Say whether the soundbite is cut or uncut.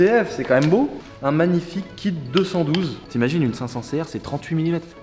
cut